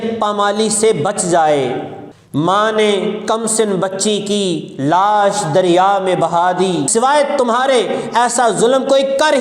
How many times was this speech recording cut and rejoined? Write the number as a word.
one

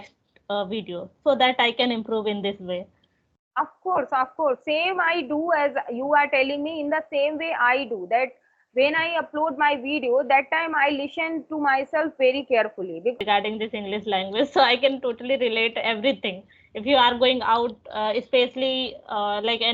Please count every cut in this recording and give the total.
one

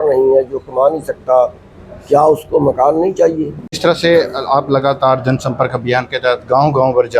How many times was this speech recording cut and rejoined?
one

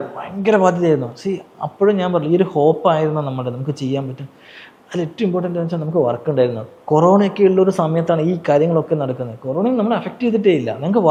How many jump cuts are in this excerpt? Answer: zero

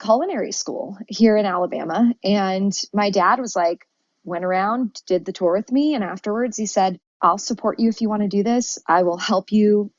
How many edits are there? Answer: one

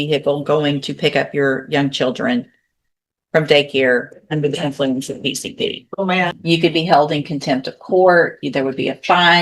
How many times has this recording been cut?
one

